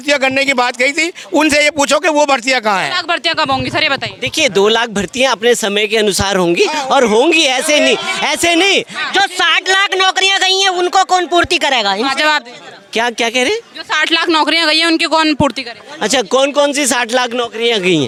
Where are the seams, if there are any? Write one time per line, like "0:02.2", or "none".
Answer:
none